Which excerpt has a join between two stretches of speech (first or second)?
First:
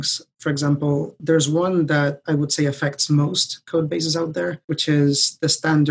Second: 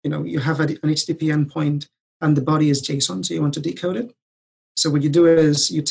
first